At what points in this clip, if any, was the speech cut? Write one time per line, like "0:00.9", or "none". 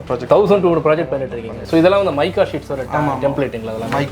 0:01.5